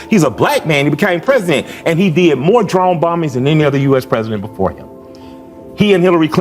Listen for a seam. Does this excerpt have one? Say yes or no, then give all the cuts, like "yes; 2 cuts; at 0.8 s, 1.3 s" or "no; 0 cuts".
yes; 1 cut; at 5.1 s